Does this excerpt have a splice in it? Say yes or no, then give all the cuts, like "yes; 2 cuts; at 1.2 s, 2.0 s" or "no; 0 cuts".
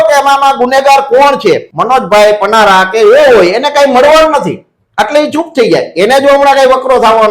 yes; 1 cut; at 1.7 s